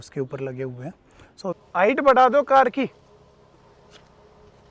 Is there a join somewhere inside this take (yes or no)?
yes